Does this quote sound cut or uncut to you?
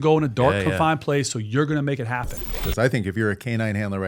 cut